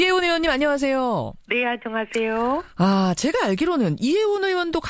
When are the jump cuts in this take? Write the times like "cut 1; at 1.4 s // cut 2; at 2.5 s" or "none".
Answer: cut 1; at 3.6 s